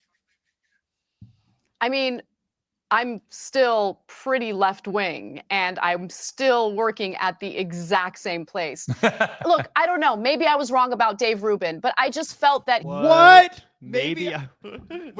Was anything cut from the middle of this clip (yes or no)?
no